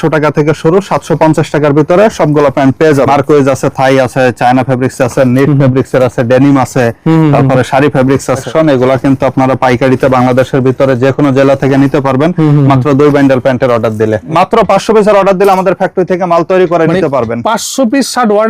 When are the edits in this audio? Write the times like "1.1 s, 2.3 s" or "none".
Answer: 3.1 s, 8.5 s, 14.2 s